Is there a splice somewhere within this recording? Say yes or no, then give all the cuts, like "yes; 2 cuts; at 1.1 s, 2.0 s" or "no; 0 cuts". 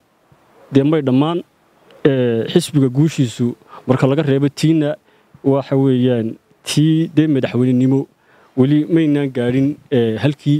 no; 0 cuts